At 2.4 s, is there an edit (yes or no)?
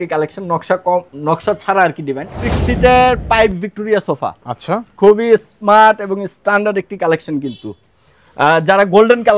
yes